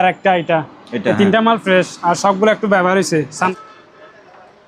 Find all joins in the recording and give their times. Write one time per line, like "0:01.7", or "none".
0:03.5